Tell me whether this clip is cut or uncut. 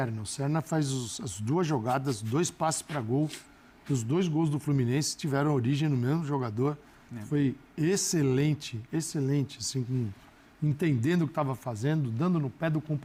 uncut